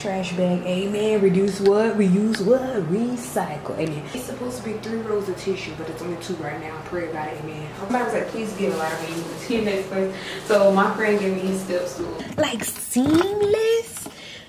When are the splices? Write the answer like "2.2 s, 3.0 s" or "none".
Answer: 4.2 s, 7.9 s, 12.2 s

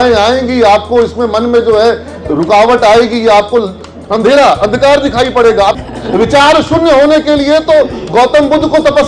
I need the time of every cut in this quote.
3.8 s, 5.8 s

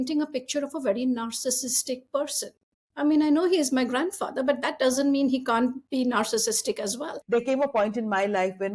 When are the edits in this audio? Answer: 5.8 s, 7.1 s

